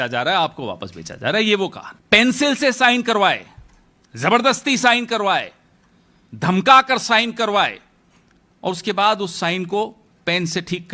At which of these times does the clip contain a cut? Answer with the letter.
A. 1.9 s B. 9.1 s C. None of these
A